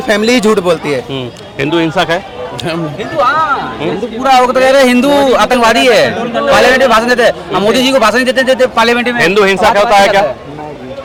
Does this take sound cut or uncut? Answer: uncut